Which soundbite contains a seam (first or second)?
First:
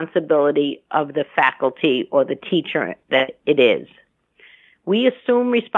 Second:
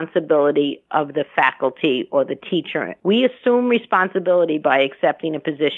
second